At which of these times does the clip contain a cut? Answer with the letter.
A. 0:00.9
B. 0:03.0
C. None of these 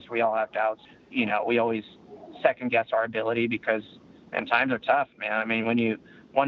A